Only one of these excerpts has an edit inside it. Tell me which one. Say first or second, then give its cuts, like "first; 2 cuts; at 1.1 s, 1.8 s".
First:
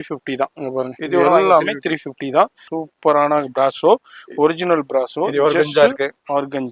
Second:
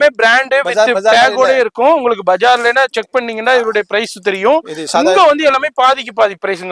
first; 1 cut; at 2.6 s